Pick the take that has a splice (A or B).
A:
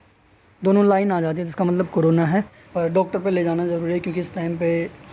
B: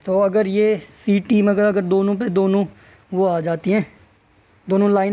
A